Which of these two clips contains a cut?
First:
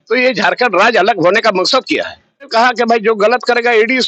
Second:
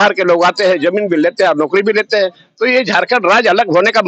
first; 1 cut; at 2.5 s

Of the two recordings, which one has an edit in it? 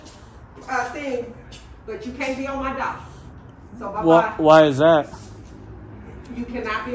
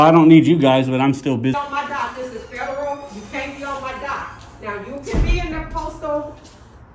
second; 1 cut; at 1.5 s

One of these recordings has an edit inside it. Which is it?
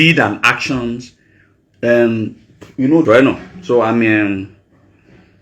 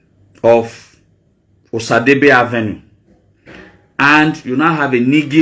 first; 1 cut; at 3.1 s

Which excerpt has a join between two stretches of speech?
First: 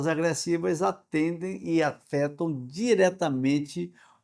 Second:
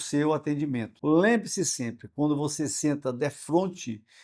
second; 1 cut; at 0.9 s

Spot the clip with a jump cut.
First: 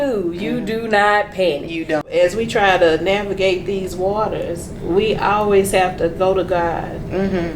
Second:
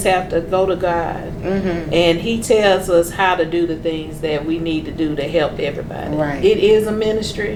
first; 1 cut; at 2.1 s

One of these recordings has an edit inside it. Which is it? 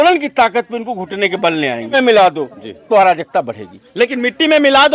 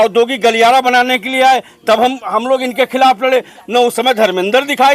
first; 1 cut; at 1.9 s

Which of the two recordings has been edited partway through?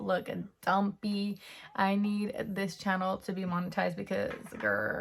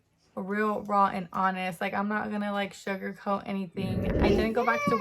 second; 1 cut; at 4.0 s

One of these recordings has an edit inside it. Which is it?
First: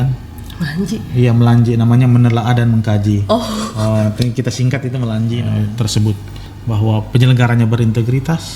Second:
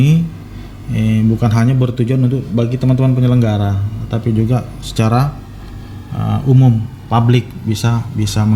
first; 1 cut; at 5.6 s

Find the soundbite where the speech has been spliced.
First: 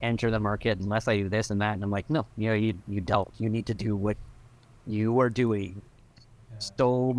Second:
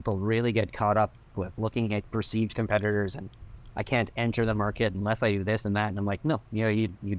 second; 1 cut; at 2.1 s

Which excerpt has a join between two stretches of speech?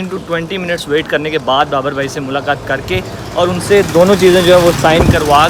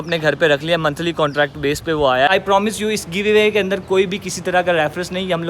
second; 1 cut; at 2.3 s

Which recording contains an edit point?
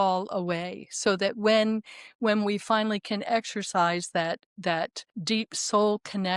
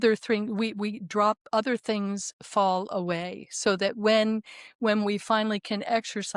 first; 1 cut; at 5.1 s

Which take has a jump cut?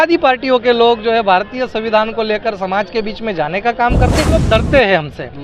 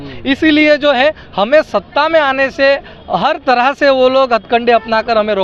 first; 1 cut; at 4.4 s

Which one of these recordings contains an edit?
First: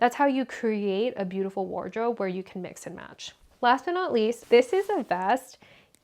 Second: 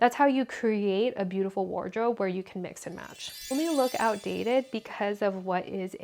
second; 1 cut; at 3.5 s

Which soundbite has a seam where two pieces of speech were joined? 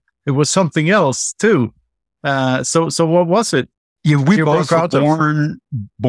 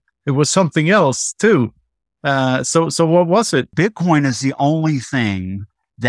second; 1 cut; at 3.7 s

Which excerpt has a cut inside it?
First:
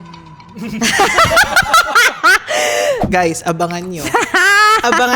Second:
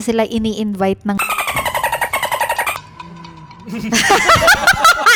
first; 1 cut; at 3.0 s

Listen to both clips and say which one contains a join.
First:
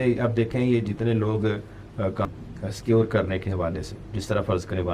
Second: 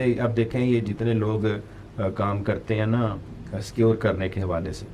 first; 1 cut; at 2.3 s

